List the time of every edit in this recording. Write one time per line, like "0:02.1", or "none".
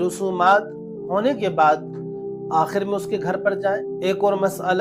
0:03.8